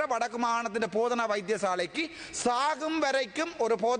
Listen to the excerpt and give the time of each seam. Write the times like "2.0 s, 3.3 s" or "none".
none